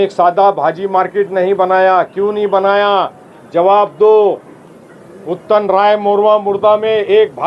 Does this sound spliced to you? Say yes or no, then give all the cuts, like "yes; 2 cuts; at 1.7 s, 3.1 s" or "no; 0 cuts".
no; 0 cuts